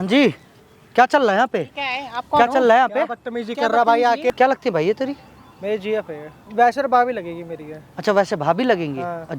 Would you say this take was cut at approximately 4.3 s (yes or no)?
yes